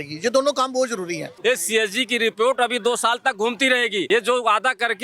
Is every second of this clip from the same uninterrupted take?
no; 2 cuts; at 1.3 s, 4.0 s

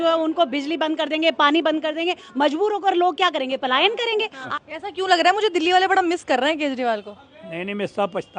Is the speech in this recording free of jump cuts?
no; 1 cut; at 4.5 s

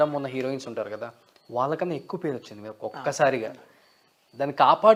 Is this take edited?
no; 0 cuts

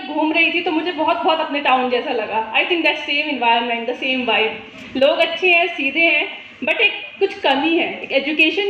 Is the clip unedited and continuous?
yes; 0 cuts

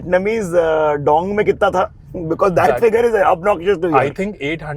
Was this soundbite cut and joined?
no; 0 cuts

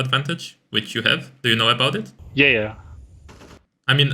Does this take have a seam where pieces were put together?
yes; 1 cut; at 2.2 s

